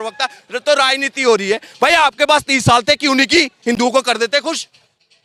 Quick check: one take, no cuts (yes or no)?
yes